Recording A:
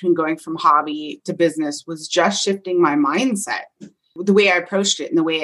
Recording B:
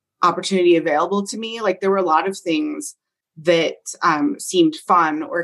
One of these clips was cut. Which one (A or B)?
A